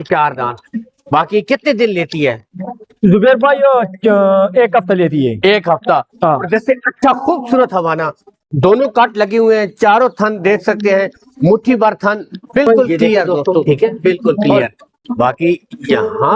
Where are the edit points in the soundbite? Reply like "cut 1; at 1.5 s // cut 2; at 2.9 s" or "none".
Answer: cut 1; at 13.6 s